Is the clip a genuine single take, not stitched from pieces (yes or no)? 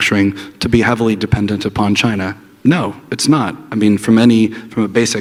yes